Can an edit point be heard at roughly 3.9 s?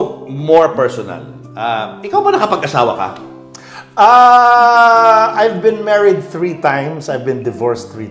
no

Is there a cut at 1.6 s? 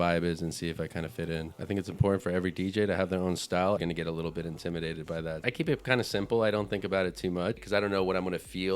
yes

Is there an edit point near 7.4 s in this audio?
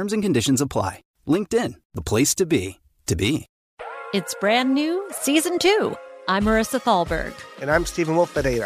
no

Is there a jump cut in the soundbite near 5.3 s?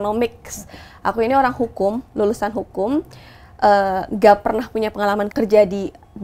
yes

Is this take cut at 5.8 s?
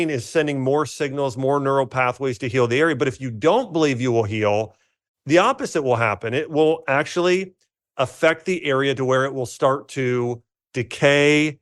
no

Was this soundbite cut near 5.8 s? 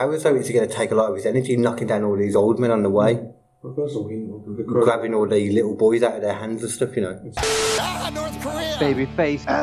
no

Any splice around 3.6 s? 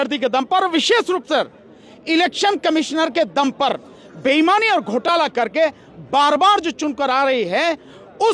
no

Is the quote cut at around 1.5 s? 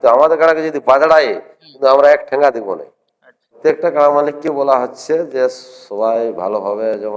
no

